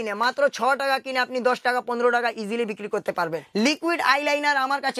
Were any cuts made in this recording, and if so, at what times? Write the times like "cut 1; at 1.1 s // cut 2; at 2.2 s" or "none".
cut 1; at 3.4 s